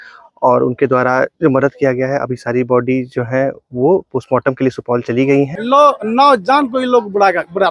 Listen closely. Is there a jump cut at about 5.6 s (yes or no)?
yes